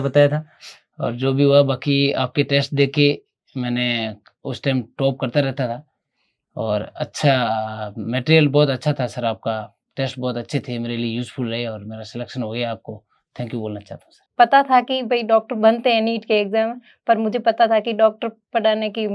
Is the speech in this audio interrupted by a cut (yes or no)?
yes